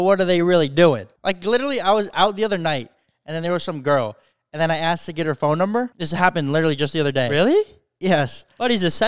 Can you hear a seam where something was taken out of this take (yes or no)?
yes